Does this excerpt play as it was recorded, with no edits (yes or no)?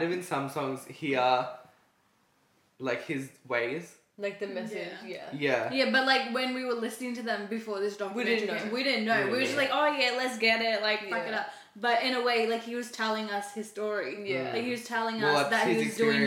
yes